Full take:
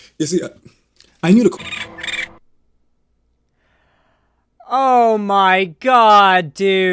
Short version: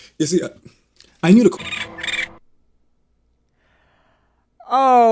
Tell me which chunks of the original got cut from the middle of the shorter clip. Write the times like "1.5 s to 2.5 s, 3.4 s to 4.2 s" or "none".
none